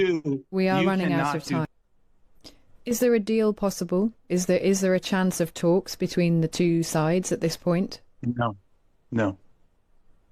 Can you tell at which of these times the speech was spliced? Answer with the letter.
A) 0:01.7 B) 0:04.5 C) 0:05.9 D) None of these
A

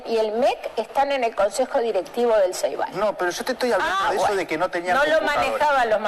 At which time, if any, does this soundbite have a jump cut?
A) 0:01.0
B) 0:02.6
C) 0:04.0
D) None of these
D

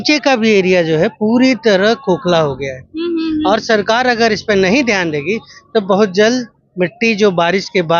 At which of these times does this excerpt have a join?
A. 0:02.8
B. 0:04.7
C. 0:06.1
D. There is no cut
D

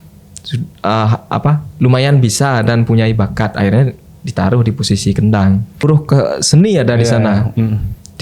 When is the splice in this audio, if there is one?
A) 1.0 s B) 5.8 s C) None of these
B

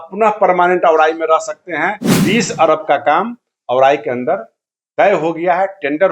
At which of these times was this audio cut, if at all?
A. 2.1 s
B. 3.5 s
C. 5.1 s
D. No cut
A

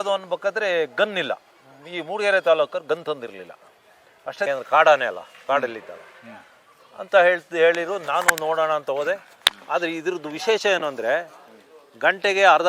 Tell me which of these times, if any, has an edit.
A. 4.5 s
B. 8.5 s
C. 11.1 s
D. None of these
A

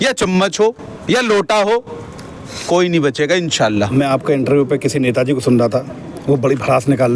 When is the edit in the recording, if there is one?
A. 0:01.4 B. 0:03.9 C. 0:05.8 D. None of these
B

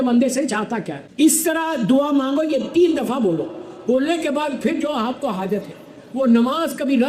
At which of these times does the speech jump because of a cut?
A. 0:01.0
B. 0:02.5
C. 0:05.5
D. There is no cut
A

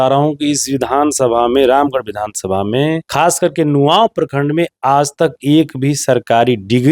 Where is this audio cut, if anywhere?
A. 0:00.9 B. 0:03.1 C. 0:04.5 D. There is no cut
B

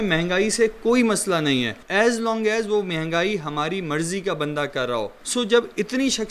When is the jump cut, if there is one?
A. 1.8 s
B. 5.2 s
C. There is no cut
C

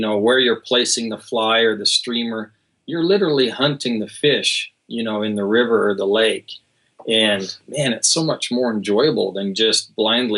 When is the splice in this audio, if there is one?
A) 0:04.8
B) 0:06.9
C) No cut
C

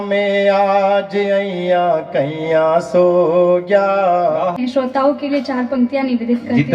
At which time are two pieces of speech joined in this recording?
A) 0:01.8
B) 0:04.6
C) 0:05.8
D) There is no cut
B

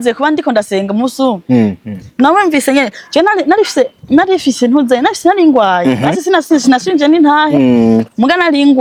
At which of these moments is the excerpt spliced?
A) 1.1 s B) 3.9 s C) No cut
C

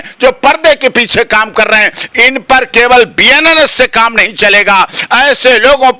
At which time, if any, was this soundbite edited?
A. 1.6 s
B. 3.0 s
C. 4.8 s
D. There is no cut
D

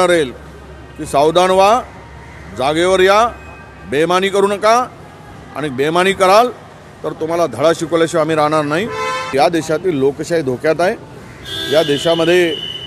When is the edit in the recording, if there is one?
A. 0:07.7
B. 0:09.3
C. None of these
B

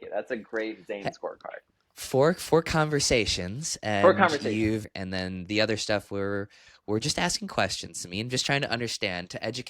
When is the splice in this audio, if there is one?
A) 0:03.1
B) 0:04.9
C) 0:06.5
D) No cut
B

